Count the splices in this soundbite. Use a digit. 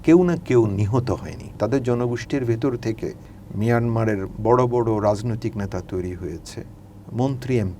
1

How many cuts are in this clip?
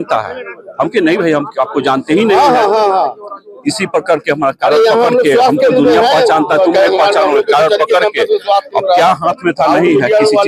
0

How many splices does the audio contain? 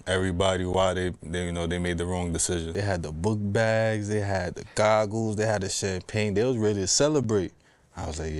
1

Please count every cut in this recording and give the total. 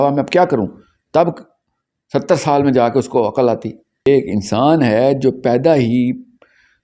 1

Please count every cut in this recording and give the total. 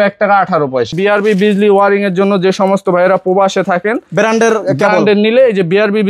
1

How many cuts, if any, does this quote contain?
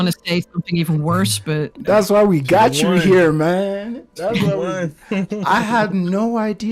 0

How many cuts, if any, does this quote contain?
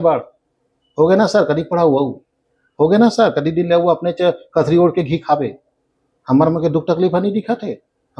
0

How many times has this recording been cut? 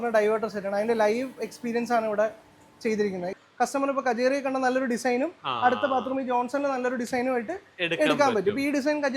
1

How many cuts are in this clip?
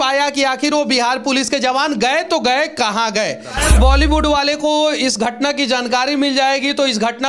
1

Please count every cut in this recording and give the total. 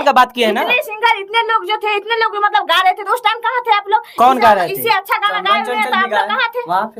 0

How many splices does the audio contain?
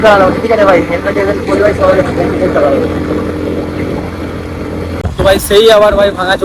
1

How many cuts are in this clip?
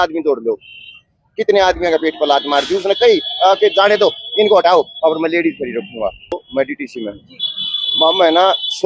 1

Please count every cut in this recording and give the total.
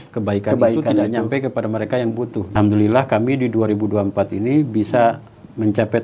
1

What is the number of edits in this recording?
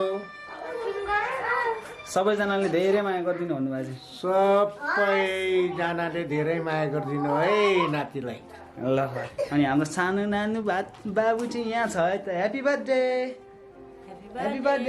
1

